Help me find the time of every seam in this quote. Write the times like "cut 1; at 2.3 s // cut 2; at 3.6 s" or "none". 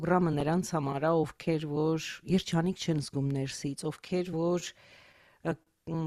none